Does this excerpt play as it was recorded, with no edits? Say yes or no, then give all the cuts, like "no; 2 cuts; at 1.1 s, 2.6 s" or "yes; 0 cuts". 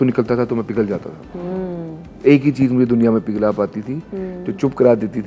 yes; 0 cuts